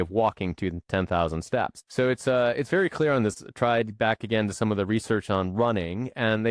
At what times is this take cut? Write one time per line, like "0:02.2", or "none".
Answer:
0:01.8
0:03.4